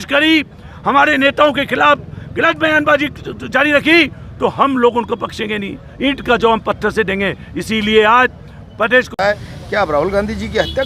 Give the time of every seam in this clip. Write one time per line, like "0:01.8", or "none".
0:09.1